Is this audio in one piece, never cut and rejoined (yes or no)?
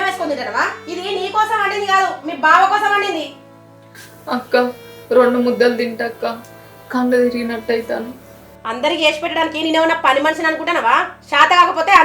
yes